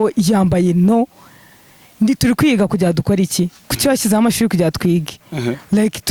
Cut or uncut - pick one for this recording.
uncut